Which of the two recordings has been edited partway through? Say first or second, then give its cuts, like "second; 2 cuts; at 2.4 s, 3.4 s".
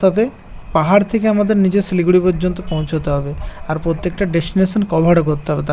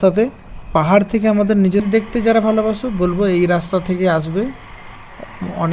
second; 1 cut; at 1.8 s